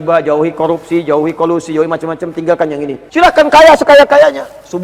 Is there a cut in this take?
yes; 1 cut; at 2.9 s

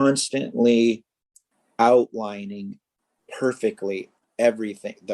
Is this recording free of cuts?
no; 1 cut; at 4.2 s

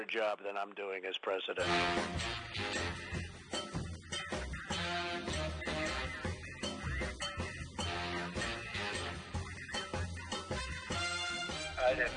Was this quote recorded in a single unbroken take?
no; 1 cut; at 1.6 s

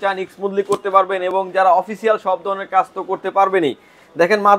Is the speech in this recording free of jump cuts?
yes; 0 cuts

